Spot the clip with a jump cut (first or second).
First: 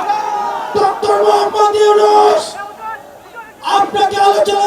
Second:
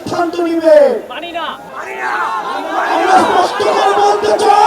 second